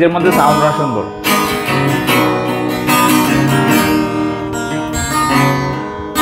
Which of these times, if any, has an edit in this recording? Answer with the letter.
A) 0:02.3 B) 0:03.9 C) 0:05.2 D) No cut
D